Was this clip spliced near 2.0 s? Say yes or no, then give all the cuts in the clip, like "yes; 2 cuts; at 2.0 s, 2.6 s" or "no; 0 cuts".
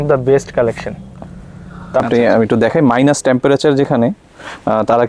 yes; 1 cut; at 2.0 s